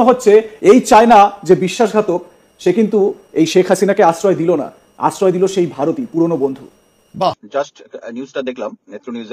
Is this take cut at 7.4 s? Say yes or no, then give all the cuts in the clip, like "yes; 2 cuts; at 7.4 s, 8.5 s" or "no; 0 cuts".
yes; 1 cut; at 7.4 s